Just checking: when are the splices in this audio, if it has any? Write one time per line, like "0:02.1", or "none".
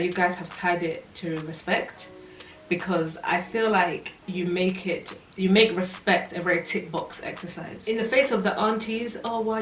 0:07.8